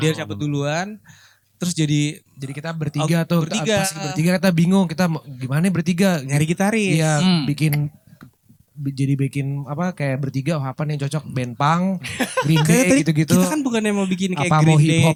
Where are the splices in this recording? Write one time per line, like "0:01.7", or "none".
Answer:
none